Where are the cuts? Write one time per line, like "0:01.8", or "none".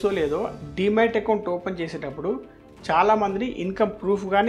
none